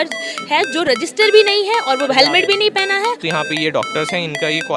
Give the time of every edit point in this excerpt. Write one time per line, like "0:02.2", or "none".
0:03.2